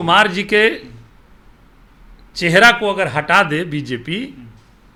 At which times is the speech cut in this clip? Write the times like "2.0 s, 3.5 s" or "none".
none